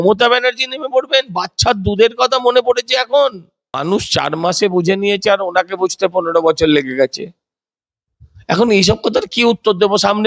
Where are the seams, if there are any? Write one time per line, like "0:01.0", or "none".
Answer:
0:03.8